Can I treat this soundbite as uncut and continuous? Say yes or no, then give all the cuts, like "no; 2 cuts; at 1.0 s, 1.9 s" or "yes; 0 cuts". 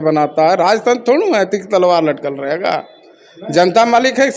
yes; 0 cuts